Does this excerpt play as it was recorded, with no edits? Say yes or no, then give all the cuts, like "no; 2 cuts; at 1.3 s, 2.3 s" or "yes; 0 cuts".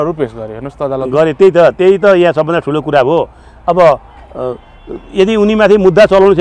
yes; 0 cuts